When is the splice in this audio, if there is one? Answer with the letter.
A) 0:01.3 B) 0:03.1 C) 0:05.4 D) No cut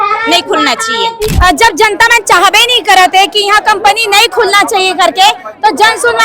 A